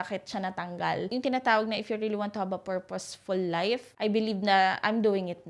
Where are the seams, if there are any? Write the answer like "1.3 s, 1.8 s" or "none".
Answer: 1.1 s